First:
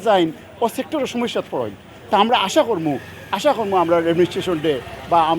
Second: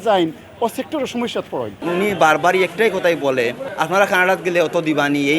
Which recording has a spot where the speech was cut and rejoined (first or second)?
second